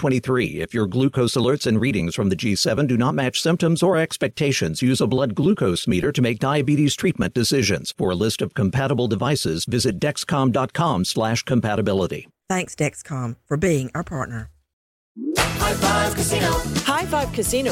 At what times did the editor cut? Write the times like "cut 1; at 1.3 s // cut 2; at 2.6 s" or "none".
cut 1; at 15.1 s